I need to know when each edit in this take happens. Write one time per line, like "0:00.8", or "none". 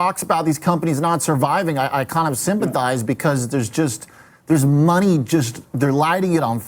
none